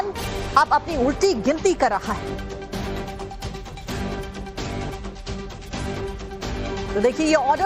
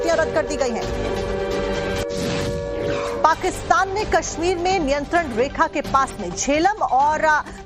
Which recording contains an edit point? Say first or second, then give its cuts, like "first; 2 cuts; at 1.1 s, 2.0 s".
first; 1 cut; at 2.1 s